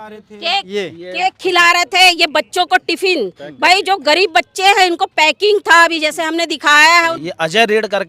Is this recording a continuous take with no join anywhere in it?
no; 1 cut; at 7.1 s

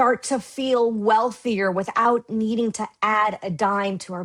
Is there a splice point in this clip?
no; 0 cuts

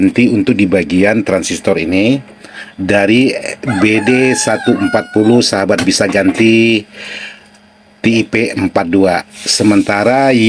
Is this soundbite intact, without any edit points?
yes; 0 cuts

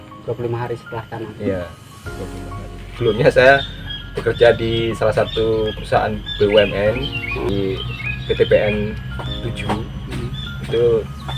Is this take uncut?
no; 2 cuts; at 2.9 s, 7.5 s

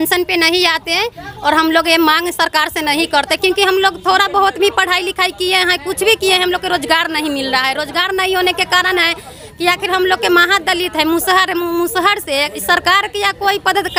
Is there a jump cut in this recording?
no; 0 cuts

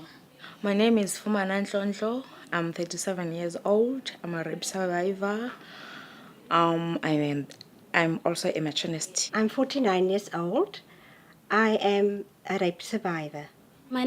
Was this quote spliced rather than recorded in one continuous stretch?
yes; 1 cut; at 8.2 s

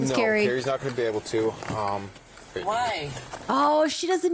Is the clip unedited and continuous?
yes; 0 cuts

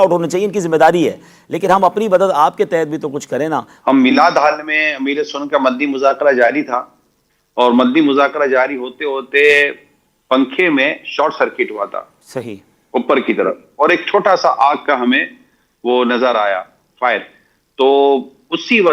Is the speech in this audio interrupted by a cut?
no; 0 cuts

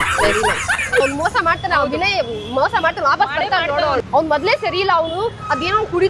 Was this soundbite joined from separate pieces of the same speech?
yes; 2 cuts; at 1.0 s, 4.0 s

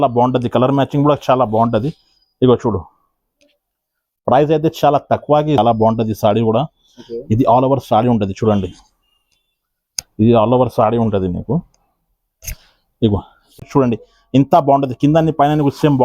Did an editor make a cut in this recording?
yes; 2 cuts; at 5.6 s, 13.6 s

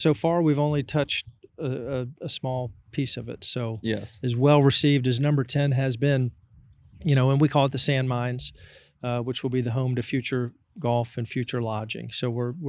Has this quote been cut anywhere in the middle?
no; 0 cuts

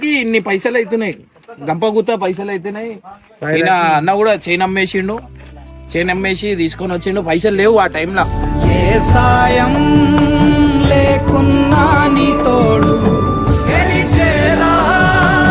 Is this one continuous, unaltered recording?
yes; 0 cuts

